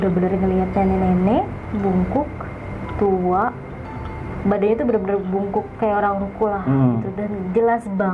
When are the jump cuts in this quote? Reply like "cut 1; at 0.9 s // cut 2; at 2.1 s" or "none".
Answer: none